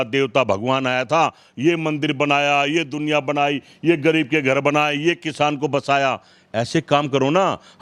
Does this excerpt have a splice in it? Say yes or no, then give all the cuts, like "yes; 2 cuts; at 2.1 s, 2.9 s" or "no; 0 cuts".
no; 0 cuts